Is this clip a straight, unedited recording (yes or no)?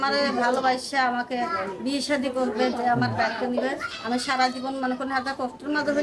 yes